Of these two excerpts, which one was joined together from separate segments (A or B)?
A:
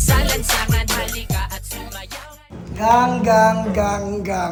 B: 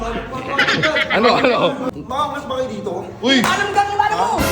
B